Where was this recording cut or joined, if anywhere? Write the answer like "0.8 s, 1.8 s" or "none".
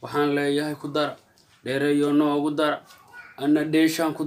none